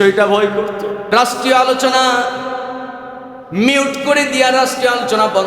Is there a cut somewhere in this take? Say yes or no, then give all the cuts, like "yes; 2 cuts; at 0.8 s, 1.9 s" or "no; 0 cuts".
yes; 1 cut; at 1.1 s